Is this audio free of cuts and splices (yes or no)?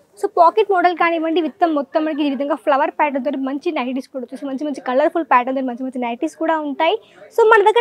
yes